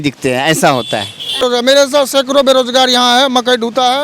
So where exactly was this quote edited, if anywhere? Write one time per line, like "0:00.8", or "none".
0:01.4